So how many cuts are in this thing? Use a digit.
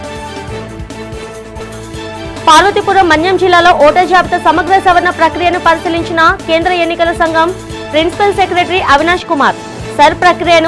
1